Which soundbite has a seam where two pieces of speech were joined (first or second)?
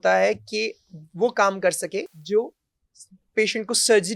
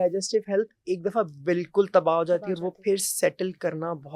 first